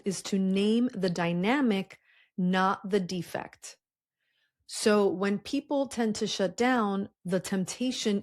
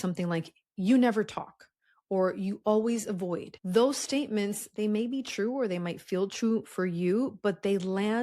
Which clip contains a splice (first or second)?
second